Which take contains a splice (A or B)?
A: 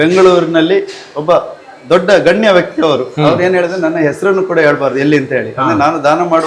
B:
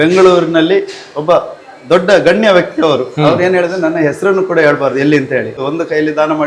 B